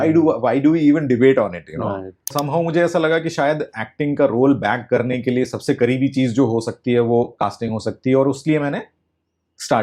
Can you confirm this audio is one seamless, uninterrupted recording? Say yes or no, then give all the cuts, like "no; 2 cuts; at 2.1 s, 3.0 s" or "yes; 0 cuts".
no; 1 cut; at 2.3 s